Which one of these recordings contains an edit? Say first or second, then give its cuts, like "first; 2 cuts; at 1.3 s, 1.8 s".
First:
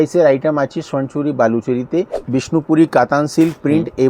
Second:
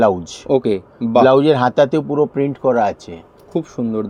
first; 1 cut; at 2.2 s